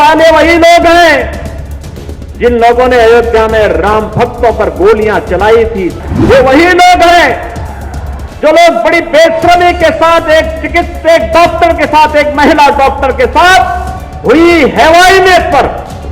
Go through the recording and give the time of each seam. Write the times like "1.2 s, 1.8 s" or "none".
5.9 s

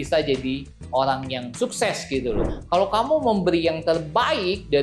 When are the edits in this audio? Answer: 2.4 s

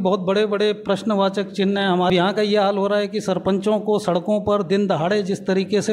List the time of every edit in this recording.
2.1 s

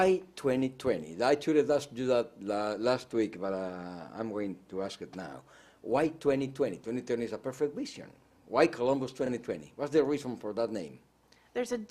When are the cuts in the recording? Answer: none

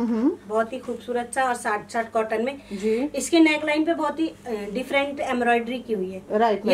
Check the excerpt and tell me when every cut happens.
none

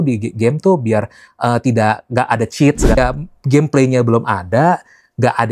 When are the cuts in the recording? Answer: 3.0 s

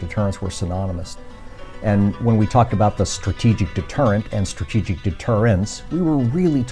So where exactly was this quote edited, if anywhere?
1.1 s

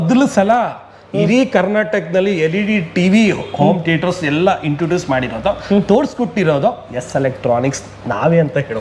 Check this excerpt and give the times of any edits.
none

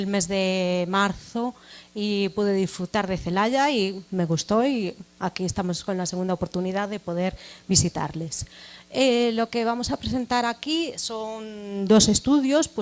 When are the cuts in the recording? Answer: 3.7 s

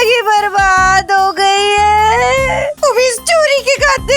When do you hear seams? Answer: 2.7 s

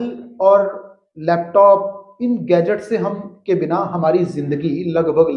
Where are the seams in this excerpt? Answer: none

